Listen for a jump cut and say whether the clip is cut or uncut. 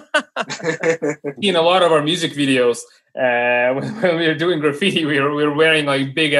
cut